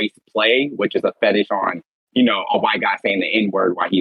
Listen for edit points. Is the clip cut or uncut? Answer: uncut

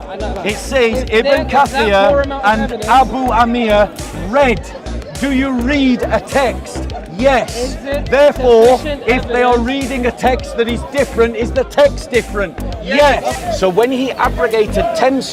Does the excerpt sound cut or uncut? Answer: cut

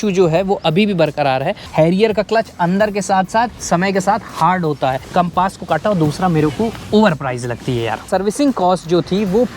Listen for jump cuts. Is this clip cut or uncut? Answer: cut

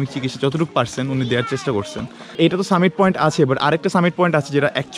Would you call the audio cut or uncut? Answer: cut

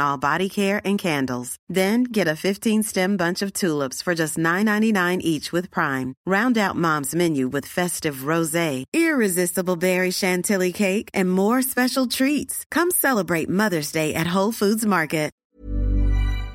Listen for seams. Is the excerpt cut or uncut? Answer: cut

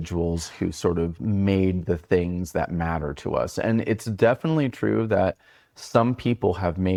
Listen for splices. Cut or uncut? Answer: uncut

